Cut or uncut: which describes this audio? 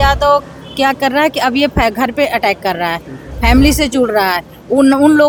uncut